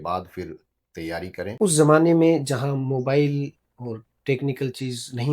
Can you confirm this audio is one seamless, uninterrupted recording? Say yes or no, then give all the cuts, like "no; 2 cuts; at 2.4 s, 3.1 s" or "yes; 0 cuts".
no; 1 cut; at 1.5 s